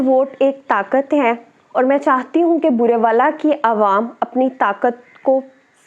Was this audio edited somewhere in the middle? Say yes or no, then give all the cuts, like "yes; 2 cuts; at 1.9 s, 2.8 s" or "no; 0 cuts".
no; 0 cuts